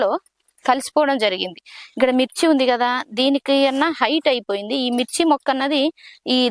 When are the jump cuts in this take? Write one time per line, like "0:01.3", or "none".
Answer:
none